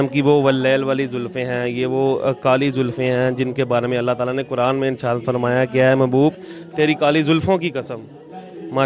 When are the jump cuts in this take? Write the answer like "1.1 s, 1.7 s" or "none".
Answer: none